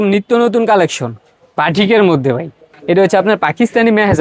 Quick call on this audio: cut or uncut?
cut